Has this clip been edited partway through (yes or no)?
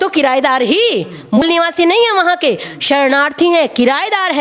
yes